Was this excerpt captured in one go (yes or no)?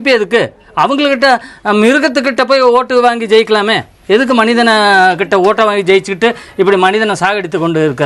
yes